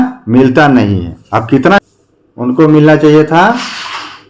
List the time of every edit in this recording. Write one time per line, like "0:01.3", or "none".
0:01.8

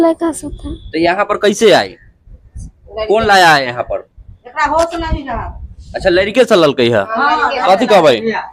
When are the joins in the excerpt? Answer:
none

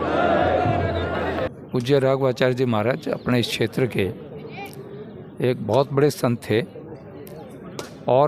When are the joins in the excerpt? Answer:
0:01.5

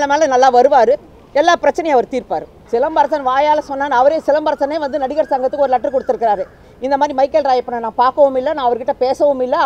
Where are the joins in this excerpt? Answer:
0:02.5

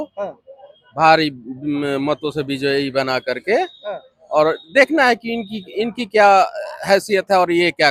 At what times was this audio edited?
none

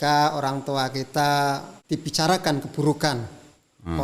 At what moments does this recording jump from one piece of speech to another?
0:01.7

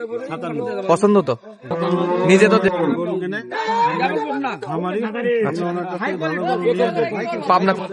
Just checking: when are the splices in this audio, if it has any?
0:02.6

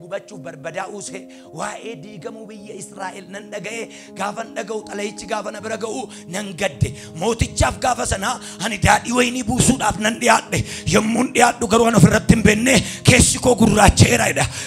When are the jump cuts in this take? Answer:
none

